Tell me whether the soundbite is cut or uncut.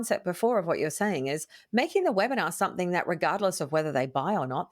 uncut